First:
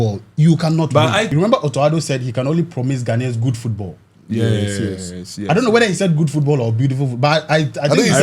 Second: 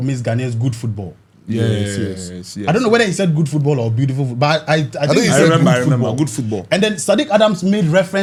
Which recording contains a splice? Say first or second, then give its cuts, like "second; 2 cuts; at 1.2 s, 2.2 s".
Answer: first; 1 cut; at 1.3 s